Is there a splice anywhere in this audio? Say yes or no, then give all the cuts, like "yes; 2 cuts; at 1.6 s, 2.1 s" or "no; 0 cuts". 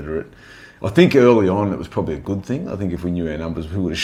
no; 0 cuts